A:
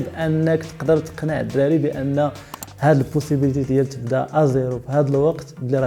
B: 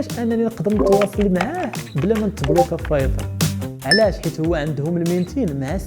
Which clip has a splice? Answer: B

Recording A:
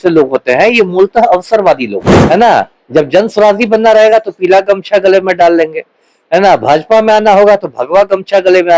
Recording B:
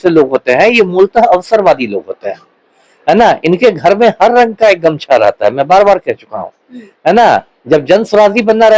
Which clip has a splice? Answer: A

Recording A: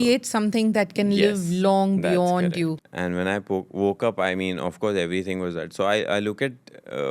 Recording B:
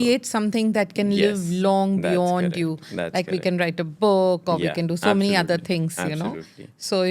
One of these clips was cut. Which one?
A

